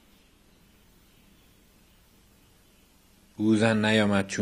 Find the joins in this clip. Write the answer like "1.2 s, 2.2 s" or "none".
none